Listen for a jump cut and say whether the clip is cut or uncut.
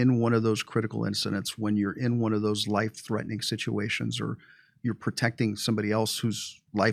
uncut